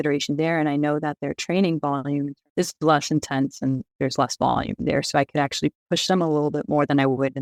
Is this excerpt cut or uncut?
uncut